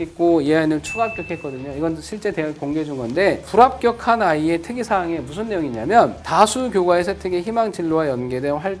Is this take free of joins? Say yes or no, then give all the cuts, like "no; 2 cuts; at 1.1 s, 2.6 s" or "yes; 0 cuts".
yes; 0 cuts